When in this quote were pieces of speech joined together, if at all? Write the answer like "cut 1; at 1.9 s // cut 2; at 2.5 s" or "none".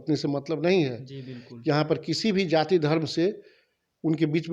none